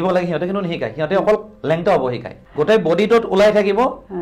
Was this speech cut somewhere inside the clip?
yes; 1 cut; at 2.4 s

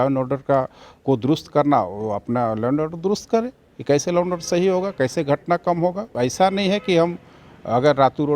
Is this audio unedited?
no; 1 cut; at 6.1 s

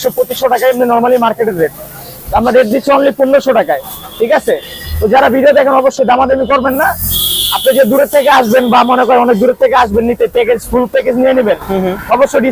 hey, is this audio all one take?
yes; 0 cuts

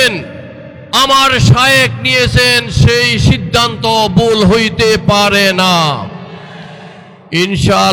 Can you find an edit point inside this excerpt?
no; 0 cuts

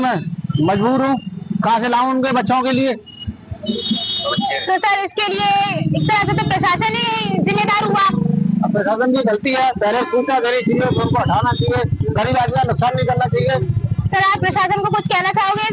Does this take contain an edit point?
no; 0 cuts

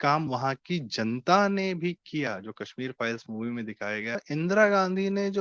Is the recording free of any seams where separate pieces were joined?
no; 1 cut; at 4.2 s

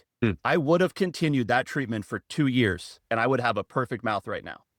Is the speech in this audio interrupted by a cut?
no; 0 cuts

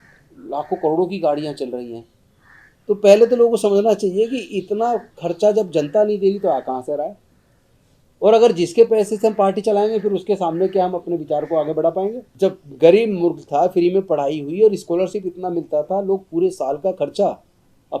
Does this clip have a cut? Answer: yes; 1 cut; at 12.3 s

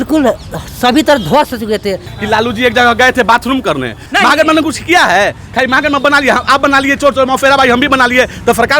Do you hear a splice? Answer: yes; 2 cuts; at 2.1 s, 4.0 s

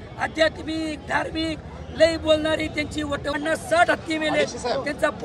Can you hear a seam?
yes; 1 cut; at 3.3 s

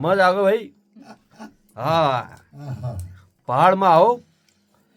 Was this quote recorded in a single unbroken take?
yes; 0 cuts

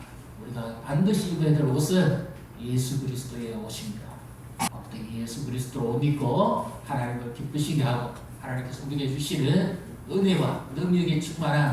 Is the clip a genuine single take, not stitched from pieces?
no; 1 cut; at 4.7 s

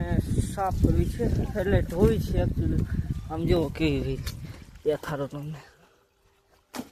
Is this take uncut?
yes; 0 cuts

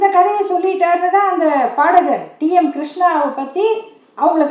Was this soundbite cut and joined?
no; 0 cuts

